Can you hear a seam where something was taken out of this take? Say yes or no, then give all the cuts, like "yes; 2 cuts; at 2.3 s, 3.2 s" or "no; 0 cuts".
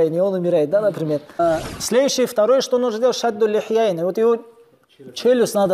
yes; 1 cut; at 1.3 s